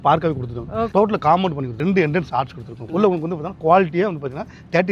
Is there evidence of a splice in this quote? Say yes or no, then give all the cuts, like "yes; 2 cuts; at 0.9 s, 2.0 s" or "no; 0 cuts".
yes; 3 cuts; at 0.9 s, 1.7 s, 2.8 s